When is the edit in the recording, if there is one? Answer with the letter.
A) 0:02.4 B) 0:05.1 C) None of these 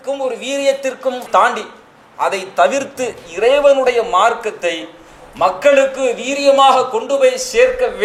C